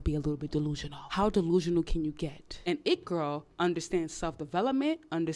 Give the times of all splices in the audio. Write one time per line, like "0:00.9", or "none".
0:00.9
0:02.5